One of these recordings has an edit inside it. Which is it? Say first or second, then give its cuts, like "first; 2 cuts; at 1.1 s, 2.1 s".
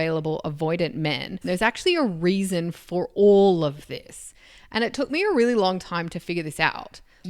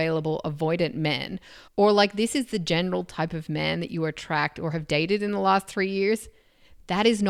first; 1 cut; at 1.3 s